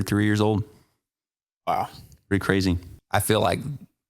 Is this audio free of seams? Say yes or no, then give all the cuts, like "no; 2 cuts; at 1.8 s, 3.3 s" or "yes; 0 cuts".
no; 1 cut; at 2.9 s